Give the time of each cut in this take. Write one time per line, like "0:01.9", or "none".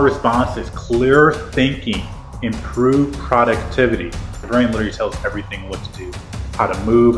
0:04.4